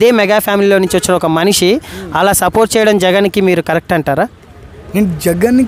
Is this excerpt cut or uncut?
uncut